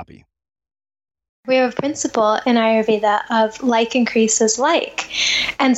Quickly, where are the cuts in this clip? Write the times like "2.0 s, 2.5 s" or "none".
1.5 s